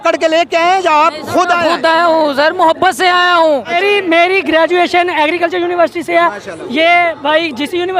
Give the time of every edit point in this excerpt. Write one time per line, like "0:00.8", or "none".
0:03.8